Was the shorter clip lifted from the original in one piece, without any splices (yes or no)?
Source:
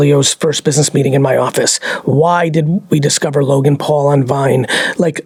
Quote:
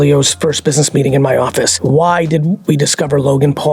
no